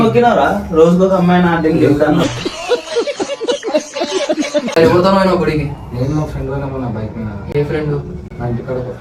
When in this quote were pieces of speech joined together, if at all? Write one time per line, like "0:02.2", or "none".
none